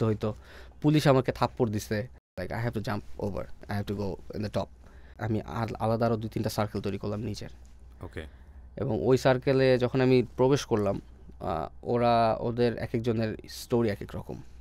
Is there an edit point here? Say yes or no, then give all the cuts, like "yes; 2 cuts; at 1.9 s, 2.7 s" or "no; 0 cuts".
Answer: yes; 3 cuts; at 2.4 s, 3.6 s, 5.2 s